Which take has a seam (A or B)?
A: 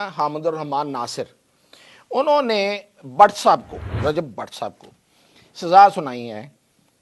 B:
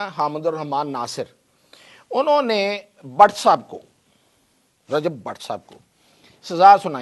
A